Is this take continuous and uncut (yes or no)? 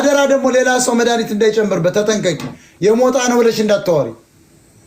yes